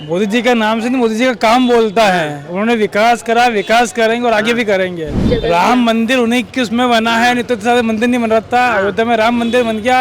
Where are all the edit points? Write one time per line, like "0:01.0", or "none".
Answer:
0:05.2